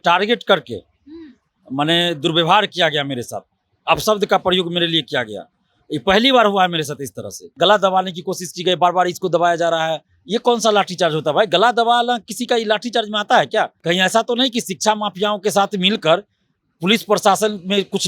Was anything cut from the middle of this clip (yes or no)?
yes